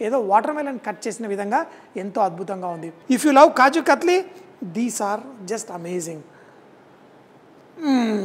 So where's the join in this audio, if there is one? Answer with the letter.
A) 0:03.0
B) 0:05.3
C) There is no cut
A